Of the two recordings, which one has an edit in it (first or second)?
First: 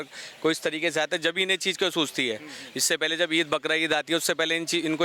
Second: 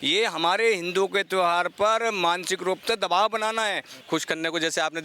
second